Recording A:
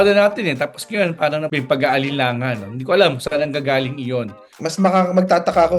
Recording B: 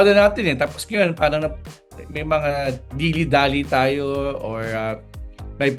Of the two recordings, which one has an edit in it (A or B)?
A